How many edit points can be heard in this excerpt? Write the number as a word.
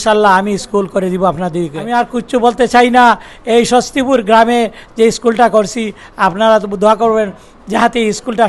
one